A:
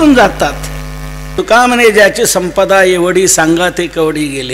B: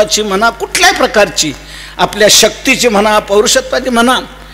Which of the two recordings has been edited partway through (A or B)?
A